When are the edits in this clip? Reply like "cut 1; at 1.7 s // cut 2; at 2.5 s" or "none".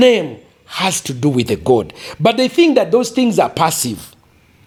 none